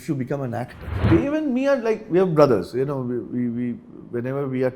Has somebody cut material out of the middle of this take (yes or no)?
yes